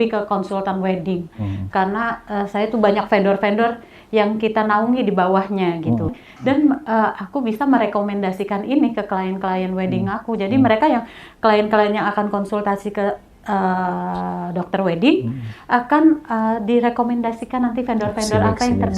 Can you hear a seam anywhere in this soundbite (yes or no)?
yes